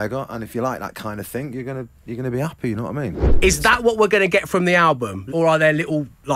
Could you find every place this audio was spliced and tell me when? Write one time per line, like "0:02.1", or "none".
0:03.2